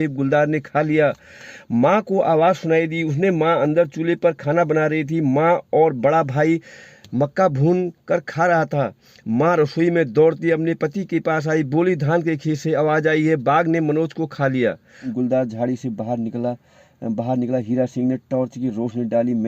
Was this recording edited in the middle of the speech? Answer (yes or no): yes